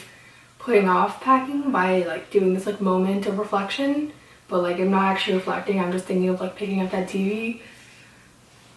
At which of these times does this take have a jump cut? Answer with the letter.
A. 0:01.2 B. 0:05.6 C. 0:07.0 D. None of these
D